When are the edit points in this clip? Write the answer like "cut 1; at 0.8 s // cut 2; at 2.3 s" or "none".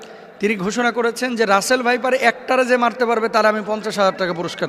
none